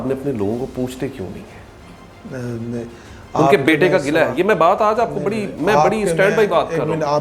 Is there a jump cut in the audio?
no; 0 cuts

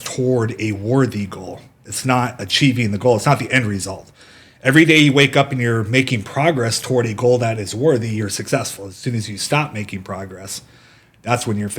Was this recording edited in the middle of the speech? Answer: no; 0 cuts

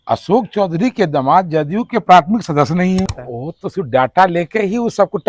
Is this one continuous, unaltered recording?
no; 1 cut; at 3.2 s

